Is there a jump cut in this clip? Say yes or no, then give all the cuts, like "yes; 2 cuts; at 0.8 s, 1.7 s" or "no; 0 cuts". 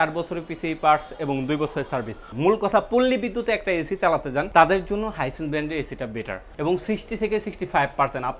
yes; 3 cuts; at 2.3 s, 4.5 s, 6.4 s